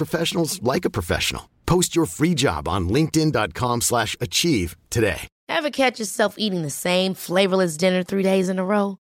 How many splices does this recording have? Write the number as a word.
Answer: one